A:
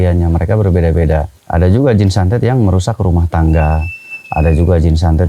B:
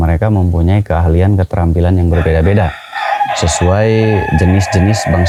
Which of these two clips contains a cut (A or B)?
A